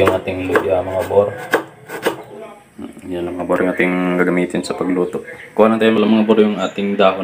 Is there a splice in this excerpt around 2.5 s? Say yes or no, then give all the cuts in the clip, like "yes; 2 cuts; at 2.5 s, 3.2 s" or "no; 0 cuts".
yes; 2 cuts; at 2.5 s, 6.0 s